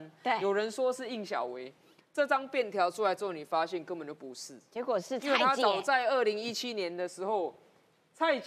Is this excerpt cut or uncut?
uncut